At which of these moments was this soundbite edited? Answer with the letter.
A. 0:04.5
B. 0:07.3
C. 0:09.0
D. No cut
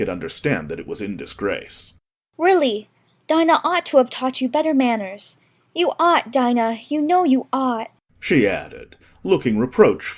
A